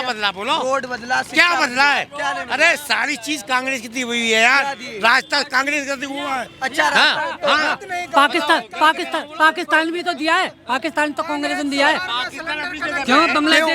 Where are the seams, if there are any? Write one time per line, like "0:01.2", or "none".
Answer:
none